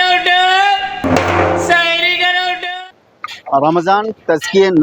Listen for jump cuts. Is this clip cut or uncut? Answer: uncut